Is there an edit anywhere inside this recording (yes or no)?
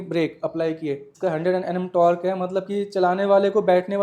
yes